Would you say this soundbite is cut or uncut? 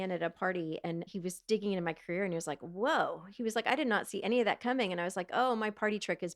cut